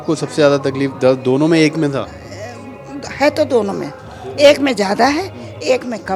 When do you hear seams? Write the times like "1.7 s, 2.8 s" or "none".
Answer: none